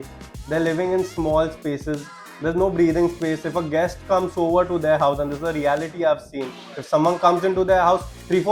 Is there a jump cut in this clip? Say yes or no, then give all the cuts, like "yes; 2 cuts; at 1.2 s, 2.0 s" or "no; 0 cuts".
no; 0 cuts